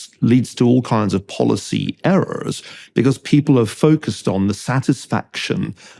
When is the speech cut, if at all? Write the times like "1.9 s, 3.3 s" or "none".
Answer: none

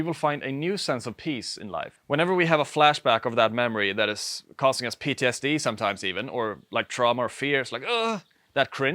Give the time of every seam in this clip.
1.9 s

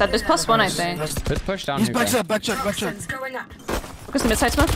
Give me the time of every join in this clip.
3.6 s

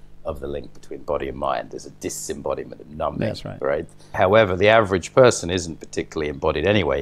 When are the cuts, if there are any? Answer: 4.1 s

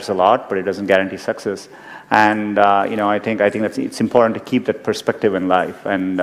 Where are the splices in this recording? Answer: none

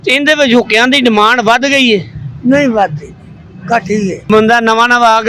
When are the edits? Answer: 4.3 s

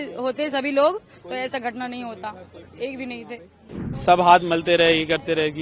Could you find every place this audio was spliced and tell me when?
3.8 s

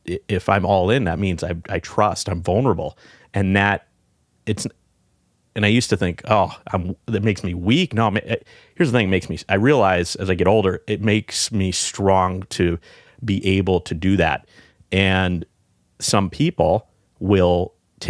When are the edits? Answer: none

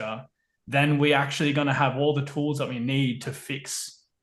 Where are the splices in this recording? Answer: none

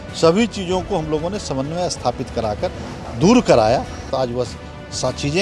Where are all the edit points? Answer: 4.1 s

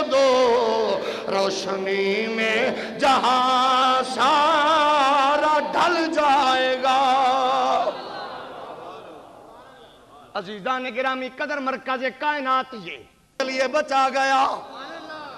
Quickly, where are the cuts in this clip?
13.3 s

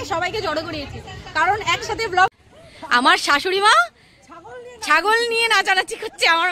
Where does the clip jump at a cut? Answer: 2.3 s

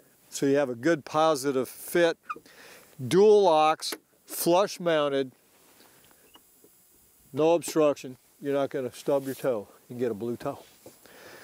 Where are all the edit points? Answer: none

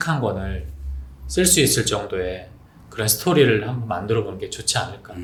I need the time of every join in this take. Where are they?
none

